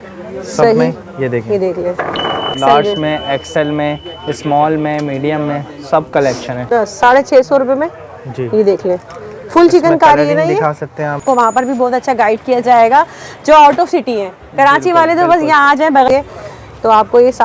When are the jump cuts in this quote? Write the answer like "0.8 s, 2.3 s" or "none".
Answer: 2.6 s, 6.7 s, 11.2 s, 16.1 s